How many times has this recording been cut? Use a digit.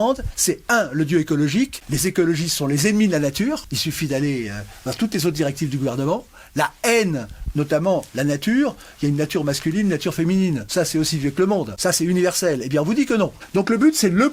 5